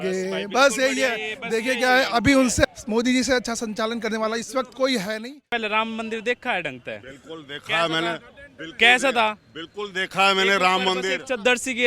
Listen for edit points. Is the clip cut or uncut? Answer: cut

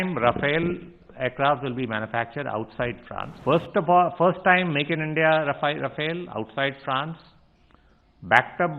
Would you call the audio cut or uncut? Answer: cut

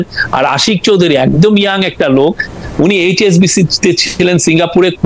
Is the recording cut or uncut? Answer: uncut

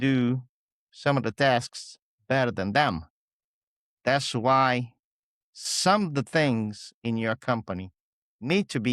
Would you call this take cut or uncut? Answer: uncut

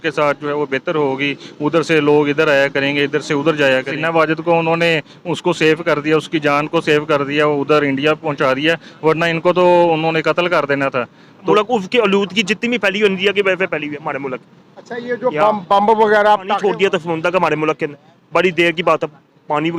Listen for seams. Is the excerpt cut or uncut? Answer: cut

